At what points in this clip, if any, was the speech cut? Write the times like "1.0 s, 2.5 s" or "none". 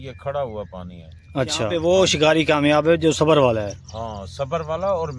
1.7 s